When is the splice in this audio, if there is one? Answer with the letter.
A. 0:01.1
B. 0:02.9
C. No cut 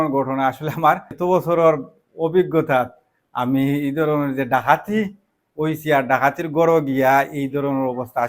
A